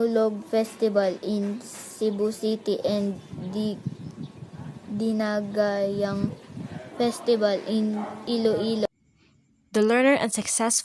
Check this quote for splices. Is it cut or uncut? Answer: uncut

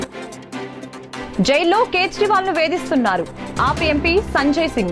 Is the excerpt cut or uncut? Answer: uncut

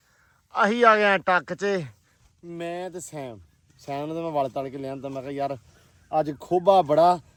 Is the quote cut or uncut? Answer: uncut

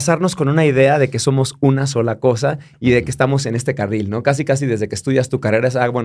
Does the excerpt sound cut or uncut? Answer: uncut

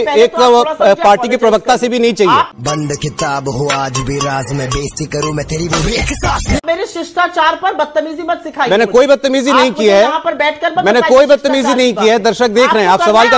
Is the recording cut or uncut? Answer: uncut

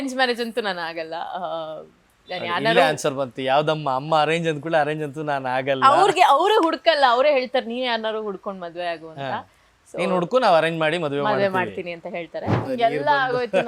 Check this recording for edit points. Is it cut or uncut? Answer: cut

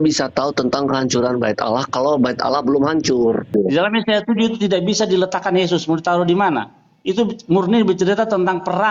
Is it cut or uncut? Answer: cut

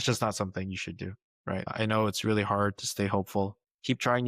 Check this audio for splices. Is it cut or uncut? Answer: cut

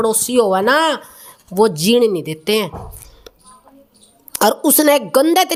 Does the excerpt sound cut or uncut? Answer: uncut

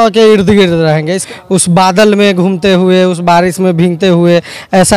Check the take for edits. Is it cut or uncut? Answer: cut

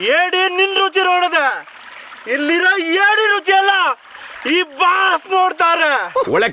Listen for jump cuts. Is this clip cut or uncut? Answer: uncut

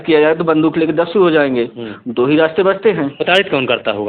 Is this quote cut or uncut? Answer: uncut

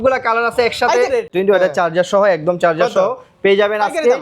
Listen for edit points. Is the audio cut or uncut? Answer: cut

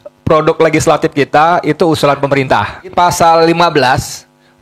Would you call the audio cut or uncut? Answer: cut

